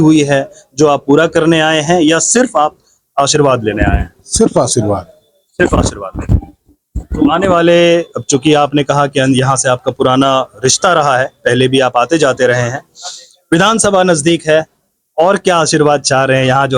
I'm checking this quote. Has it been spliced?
no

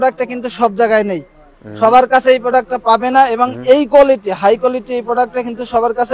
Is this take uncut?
yes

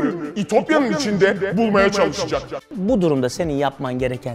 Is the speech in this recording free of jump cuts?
no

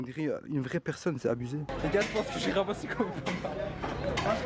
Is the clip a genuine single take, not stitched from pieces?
no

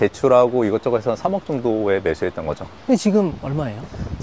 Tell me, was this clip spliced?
yes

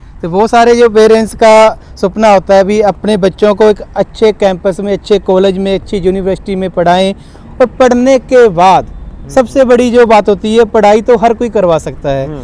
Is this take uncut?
no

